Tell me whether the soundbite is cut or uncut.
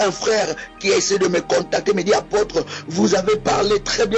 uncut